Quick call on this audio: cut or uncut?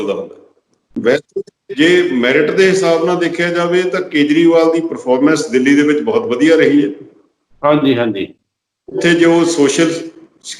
cut